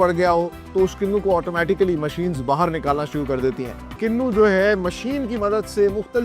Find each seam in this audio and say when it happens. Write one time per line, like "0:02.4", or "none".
0:04.0